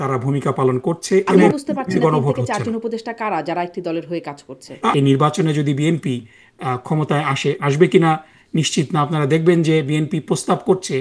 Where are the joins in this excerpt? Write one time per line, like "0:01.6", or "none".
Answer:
0:01.4
0:04.9